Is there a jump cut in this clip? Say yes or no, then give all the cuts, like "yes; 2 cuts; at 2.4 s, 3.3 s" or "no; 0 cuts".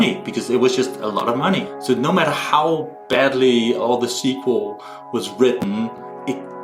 yes; 1 cut; at 1.7 s